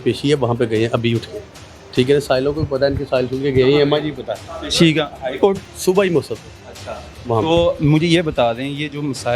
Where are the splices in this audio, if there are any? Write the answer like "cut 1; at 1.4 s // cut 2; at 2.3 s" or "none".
none